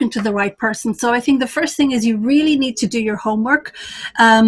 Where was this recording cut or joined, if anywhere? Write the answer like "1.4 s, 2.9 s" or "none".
none